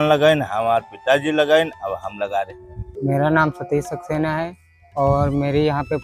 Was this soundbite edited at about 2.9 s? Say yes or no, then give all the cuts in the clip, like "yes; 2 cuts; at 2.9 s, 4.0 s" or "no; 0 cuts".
yes; 1 cut; at 2.9 s